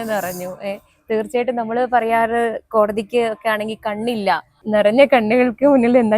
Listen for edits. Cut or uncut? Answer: cut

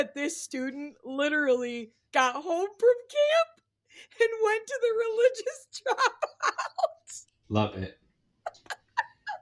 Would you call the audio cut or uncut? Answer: uncut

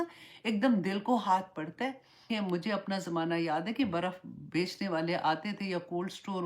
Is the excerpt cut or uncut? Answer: cut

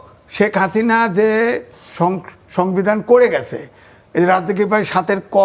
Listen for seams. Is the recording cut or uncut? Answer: uncut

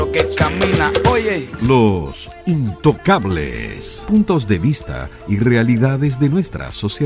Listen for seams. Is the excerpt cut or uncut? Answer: cut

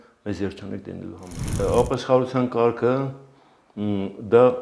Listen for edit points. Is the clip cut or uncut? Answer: cut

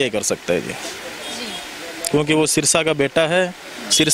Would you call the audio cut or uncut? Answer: uncut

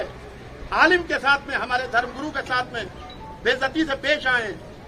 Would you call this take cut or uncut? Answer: uncut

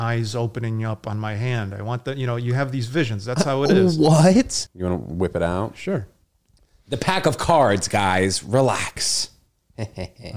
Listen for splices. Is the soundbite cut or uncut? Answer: cut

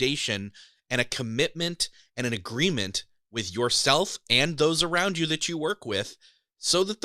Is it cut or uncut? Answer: uncut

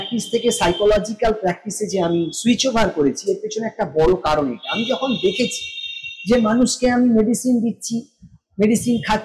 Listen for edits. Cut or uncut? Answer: uncut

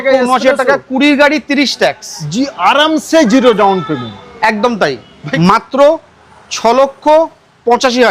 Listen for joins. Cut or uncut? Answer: cut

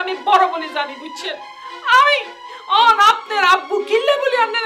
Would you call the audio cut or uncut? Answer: uncut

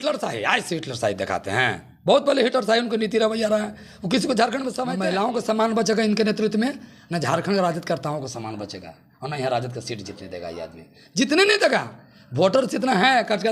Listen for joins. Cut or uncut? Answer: cut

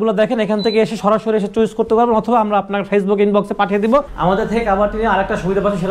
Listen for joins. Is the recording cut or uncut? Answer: cut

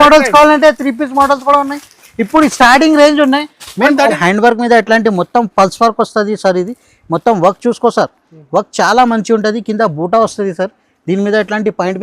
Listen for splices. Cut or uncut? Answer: cut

